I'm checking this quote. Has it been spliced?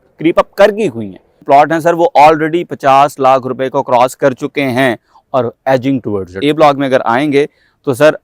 yes; 2 cuts; at 1.4 s, 6.4 s

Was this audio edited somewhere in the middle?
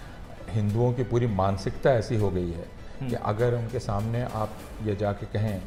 no; 0 cuts

